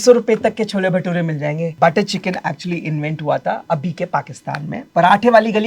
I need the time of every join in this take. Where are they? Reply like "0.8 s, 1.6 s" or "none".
1.7 s, 4.8 s